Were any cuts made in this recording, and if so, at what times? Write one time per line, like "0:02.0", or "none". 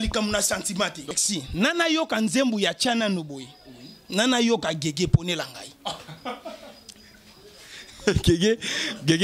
0:01.0